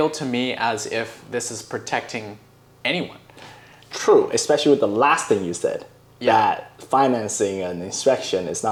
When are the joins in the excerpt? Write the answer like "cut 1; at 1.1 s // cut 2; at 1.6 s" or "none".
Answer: none